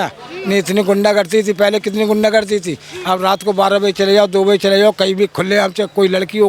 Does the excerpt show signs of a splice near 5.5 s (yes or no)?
no